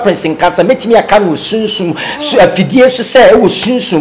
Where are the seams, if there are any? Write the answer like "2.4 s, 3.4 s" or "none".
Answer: none